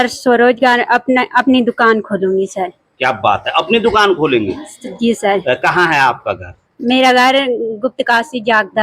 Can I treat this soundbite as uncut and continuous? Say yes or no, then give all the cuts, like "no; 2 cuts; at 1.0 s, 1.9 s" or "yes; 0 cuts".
yes; 0 cuts